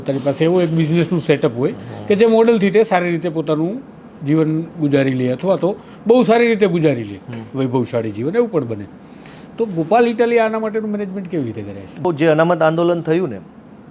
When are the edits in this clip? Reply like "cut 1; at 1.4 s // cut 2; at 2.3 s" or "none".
cut 1; at 12.0 s